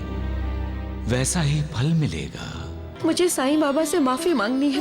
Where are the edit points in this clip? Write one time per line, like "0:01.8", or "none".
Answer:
0:02.8